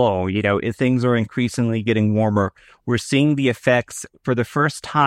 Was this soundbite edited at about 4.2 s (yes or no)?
yes